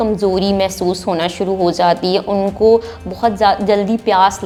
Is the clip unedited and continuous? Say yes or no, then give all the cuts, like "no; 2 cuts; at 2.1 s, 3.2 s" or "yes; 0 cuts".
yes; 0 cuts